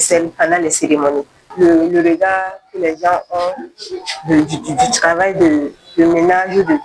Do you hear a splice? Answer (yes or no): yes